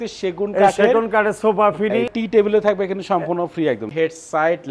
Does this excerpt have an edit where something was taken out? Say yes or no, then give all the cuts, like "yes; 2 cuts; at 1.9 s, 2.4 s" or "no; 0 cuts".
yes; 2 cuts; at 2.1 s, 3.9 s